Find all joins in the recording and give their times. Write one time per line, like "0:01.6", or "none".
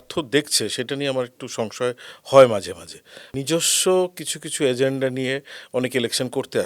0:03.3